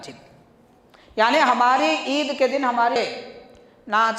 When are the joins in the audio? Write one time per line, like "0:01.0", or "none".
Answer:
0:03.0